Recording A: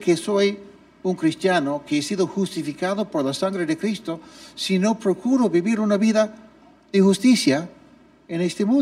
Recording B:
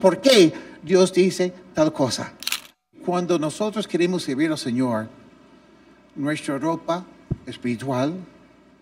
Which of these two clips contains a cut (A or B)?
B